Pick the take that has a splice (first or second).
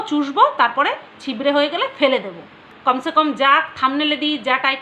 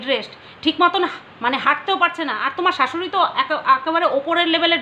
first